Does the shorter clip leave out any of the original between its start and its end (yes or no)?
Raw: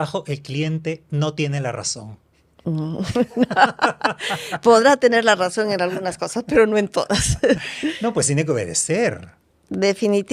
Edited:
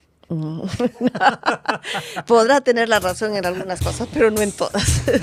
no